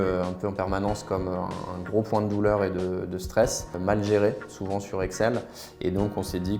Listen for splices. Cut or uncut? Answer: cut